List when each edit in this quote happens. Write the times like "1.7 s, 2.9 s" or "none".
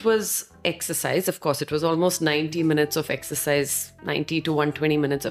none